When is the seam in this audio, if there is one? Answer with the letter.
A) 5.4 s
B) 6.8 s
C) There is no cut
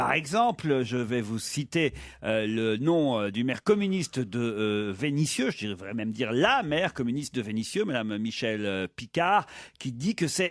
B